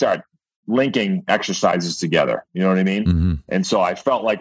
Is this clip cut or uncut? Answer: uncut